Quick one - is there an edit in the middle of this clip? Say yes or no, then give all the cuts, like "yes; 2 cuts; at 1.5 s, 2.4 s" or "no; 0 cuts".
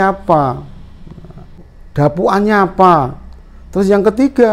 yes; 1 cut; at 1.7 s